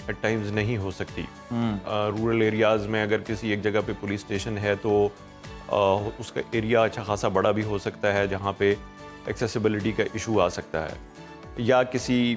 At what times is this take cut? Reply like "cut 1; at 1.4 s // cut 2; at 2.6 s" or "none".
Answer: none